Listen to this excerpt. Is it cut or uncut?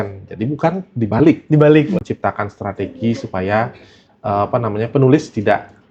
cut